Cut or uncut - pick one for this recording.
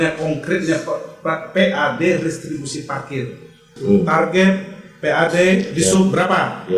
cut